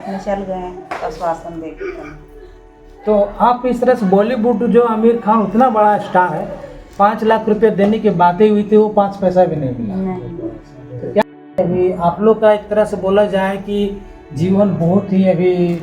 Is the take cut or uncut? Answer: cut